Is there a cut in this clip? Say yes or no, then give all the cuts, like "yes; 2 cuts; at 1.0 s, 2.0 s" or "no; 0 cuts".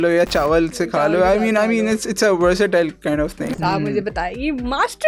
yes; 1 cut; at 3.5 s